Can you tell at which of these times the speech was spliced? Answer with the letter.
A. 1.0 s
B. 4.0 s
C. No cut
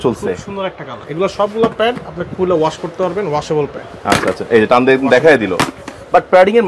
A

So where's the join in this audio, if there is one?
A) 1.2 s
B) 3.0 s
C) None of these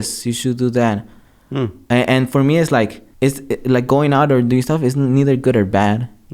B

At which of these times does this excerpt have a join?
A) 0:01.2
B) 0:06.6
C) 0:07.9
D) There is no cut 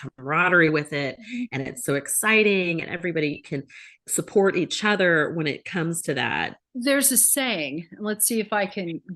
B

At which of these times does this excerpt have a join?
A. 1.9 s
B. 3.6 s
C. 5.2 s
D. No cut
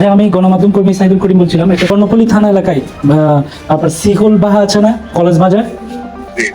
A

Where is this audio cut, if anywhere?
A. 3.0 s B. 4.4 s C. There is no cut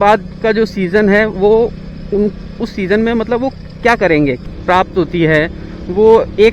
B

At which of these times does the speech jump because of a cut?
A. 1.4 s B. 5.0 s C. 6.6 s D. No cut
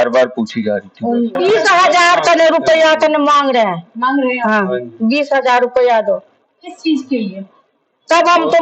A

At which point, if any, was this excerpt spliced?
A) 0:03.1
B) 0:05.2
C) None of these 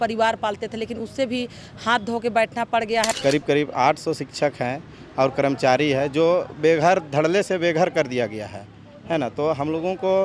A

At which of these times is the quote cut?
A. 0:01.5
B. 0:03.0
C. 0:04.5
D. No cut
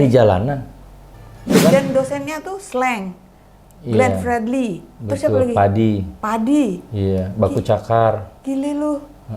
A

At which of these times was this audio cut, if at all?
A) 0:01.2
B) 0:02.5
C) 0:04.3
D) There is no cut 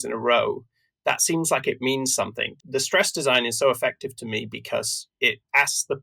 B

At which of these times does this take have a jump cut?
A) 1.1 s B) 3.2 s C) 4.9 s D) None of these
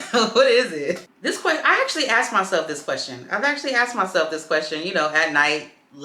A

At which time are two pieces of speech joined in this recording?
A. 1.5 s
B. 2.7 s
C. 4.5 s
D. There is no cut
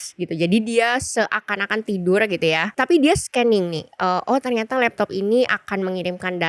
B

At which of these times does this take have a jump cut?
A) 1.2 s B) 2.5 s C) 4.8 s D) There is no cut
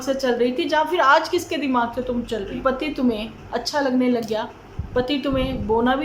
B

